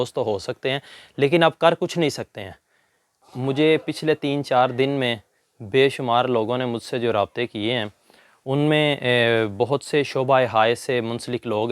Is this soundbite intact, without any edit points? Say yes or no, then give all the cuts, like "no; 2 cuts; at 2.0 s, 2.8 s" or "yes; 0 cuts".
no; 1 cut; at 3.1 s